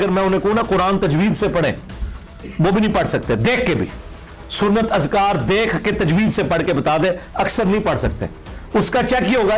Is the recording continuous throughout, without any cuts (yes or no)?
yes